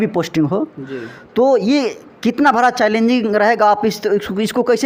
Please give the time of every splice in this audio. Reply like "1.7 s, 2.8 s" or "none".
none

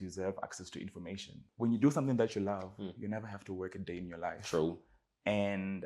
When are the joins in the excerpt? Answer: 1.4 s

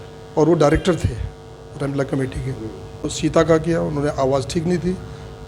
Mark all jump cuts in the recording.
3.1 s

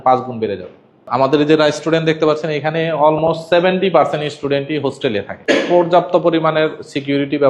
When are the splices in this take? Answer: 1.1 s, 5.3 s

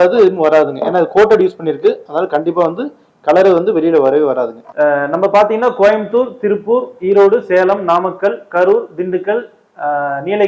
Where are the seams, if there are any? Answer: 4.6 s

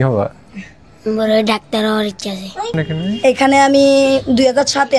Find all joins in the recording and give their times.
2.8 s

